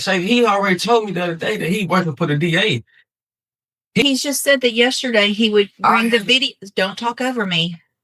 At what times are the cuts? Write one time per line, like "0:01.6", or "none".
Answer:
0:04.0